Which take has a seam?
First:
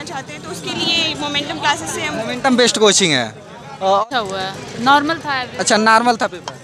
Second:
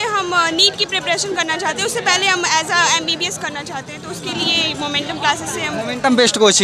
first; 1 cut; at 4.0 s

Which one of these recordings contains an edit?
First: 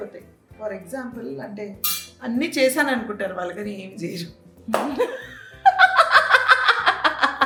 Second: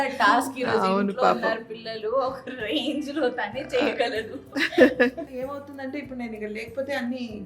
second; 1 cut; at 5.3 s

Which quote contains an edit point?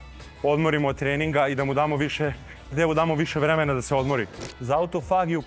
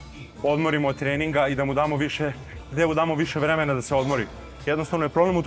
first; 1 cut; at 4.5 s

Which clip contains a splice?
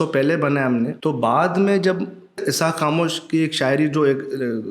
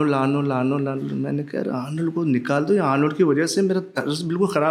first; 2 cuts; at 1.0 s, 2.4 s

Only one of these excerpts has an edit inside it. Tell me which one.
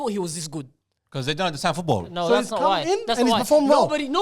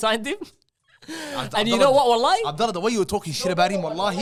first; 1 cut; at 2.1 s

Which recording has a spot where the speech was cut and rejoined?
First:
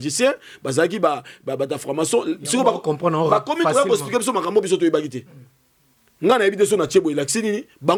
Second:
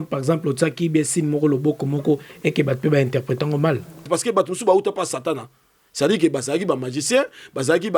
second; 1 cut; at 4.0 s

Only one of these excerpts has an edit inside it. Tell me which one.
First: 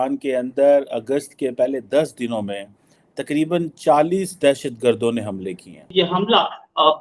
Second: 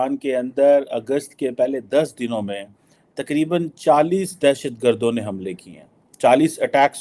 first; 1 cut; at 5.9 s

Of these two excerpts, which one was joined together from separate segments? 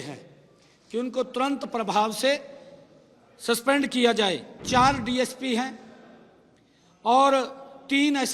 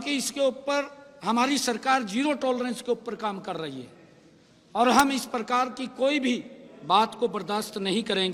first; 1 cut; at 4.5 s

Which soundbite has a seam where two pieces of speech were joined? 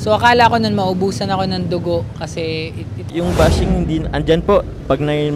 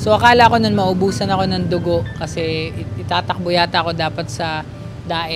first; 1 cut; at 3.1 s

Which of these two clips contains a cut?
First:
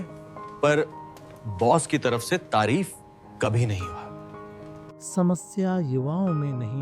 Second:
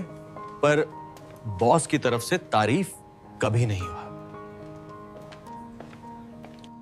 first; 1 cut; at 5.0 s

